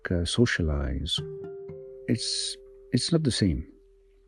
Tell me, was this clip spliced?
yes; 1 cut; at 1.5 s

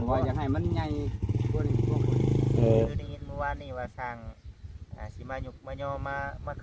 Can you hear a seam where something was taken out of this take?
yes; 1 cut; at 2.9 s

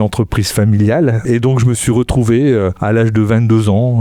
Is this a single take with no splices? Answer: no; 2 cuts; at 1.2 s, 2.8 s

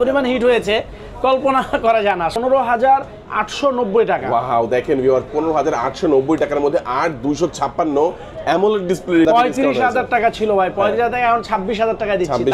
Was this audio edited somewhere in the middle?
yes; 2 cuts; at 2.4 s, 9.3 s

